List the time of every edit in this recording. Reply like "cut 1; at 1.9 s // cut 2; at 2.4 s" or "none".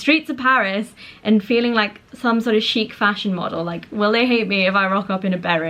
none